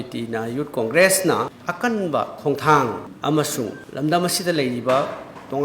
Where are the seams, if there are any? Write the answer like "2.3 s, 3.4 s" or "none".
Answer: 1.6 s, 3.1 s

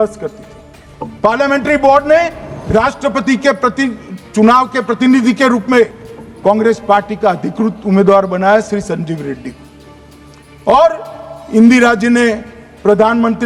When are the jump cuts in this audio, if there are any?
none

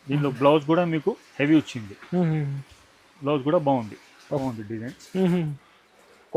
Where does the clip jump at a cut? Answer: 4.4 s

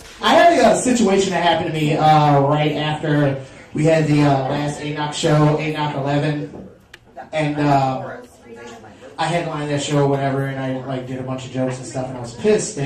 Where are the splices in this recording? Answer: none

